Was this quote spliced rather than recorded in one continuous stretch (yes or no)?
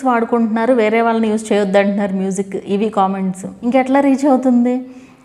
yes